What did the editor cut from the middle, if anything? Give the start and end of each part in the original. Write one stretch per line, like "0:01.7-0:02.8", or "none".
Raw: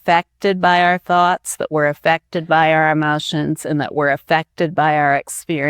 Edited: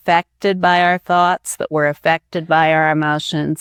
none